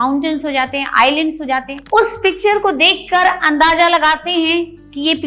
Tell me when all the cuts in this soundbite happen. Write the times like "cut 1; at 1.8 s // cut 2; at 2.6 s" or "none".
cut 1; at 1.7 s